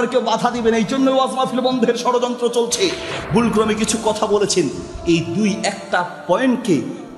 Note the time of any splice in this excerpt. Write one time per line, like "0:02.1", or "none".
0:03.1

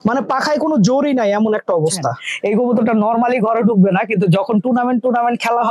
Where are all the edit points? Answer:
0:02.3

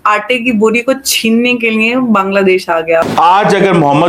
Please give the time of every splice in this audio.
0:03.1

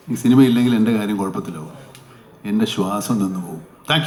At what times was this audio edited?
none

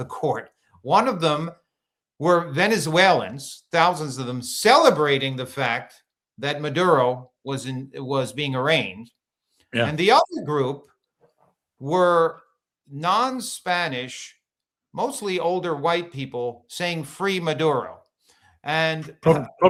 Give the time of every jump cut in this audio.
none

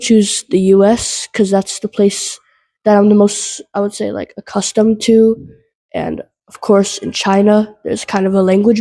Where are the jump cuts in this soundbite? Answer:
none

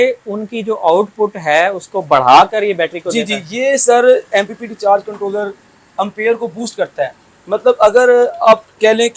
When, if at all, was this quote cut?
none

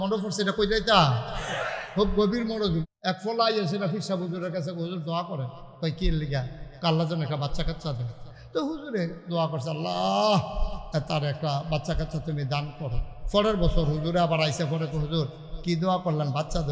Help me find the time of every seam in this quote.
0:02.8

